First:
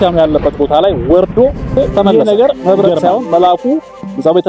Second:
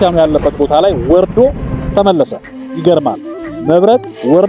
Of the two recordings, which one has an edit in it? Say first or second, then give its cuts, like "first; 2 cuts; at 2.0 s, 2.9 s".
first; 1 cut; at 2.0 s